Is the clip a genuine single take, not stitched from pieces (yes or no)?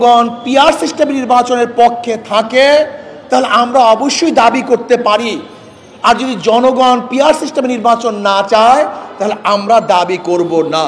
yes